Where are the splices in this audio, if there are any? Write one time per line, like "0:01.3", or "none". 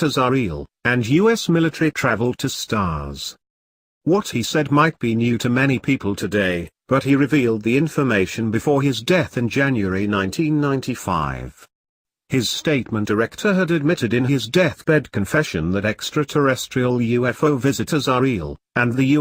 none

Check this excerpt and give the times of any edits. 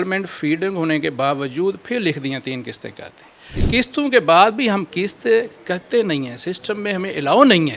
0:03.6

